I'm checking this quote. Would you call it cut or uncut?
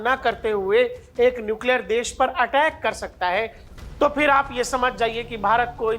cut